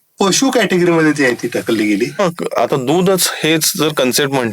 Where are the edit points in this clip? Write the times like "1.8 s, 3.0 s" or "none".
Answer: 2.2 s